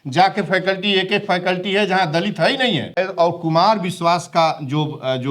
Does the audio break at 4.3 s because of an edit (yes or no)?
no